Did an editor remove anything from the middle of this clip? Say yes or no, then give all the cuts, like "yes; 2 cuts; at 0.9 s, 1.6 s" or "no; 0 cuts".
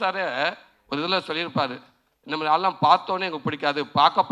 no; 0 cuts